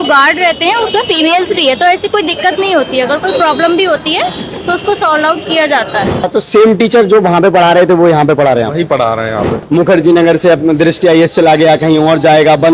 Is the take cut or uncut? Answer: cut